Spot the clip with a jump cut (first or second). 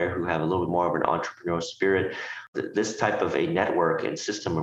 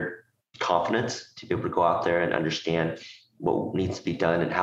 first